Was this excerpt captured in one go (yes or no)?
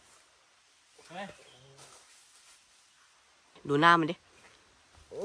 no